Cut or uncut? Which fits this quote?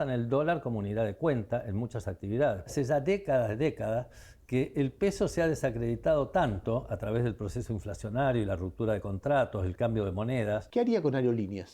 cut